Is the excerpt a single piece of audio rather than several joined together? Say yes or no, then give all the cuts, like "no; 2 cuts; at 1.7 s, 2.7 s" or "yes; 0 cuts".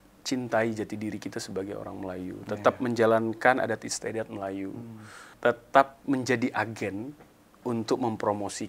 no; 1 cut; at 5.3 s